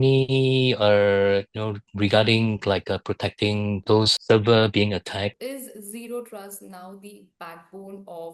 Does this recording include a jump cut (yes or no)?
yes